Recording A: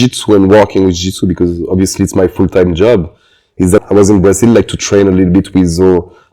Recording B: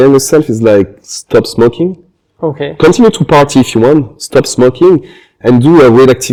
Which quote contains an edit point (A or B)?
A